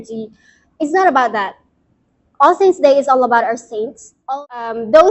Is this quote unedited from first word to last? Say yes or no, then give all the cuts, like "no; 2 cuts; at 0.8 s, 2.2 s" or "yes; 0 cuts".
no; 1 cut; at 4.1 s